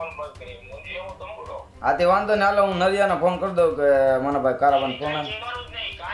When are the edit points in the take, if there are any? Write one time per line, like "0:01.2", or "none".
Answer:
0:01.7